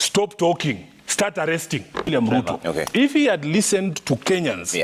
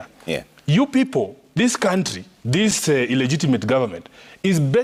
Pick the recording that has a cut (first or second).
first